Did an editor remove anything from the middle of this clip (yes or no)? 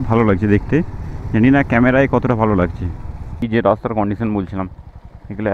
yes